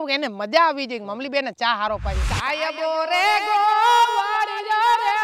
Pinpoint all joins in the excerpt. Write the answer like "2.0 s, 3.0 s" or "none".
2.2 s